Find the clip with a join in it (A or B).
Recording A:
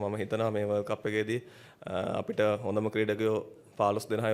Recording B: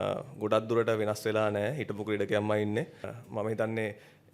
B